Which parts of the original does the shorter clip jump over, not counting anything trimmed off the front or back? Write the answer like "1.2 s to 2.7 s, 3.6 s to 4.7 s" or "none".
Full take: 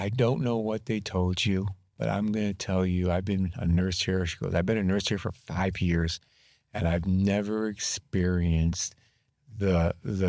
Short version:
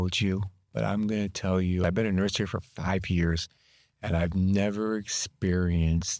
3.1 s to 4.5 s

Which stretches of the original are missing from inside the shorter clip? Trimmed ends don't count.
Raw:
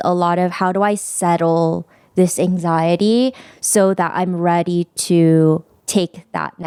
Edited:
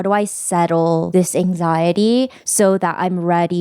1.8 s to 2.1 s, 3.4 s to 3.6 s

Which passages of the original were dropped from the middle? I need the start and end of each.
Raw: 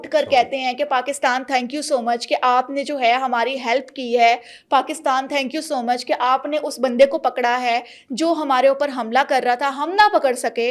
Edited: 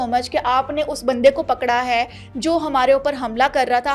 none

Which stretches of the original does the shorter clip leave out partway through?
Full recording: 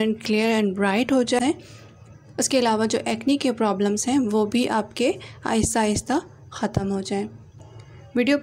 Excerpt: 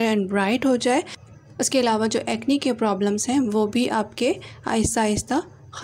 1.4 s to 1.7 s

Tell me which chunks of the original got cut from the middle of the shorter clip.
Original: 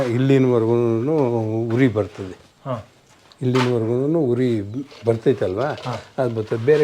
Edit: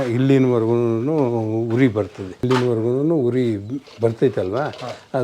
2.3 s to 3.3 s

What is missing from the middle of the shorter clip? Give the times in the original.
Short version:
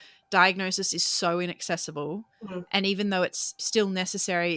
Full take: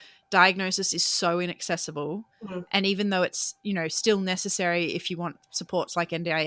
3.6 s to 3.9 s

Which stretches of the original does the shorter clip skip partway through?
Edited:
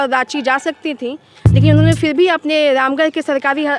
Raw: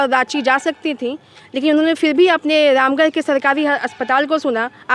none

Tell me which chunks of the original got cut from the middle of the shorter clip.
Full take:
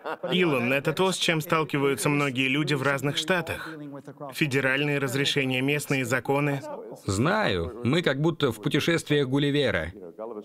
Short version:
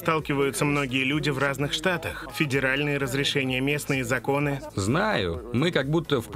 3.6 s to 4.2 s, 6.7 s to 7.0 s

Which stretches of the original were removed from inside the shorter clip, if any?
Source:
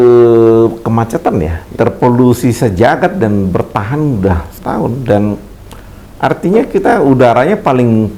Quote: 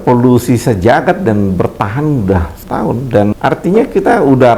5.3 s to 6.2 s

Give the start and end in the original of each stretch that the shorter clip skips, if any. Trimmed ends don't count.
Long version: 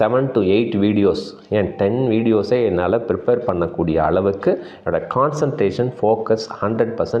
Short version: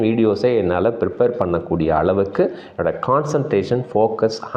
none

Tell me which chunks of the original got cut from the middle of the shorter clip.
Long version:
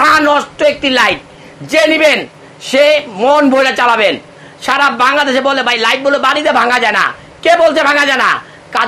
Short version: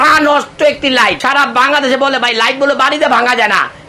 1.2 s to 4.6 s

